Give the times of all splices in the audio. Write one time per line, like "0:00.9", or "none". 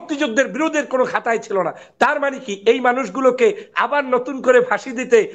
none